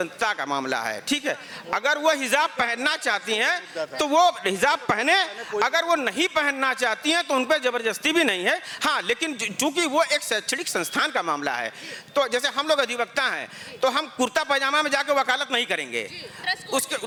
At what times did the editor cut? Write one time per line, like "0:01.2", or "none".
none